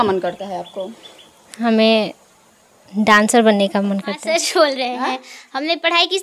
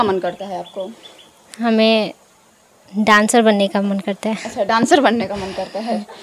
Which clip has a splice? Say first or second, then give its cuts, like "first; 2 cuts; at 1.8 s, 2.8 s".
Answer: first; 1 cut; at 4.2 s